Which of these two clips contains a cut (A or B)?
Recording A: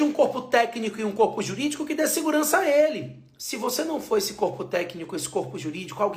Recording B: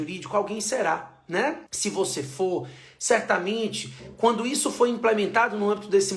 B